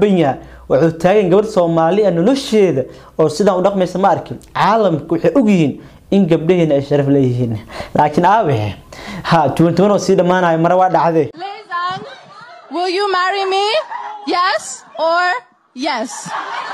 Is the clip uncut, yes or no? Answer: no